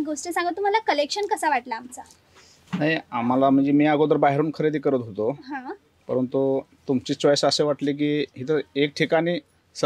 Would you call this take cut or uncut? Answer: uncut